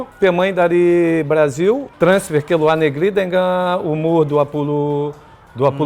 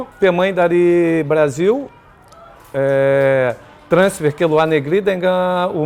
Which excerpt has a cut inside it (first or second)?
first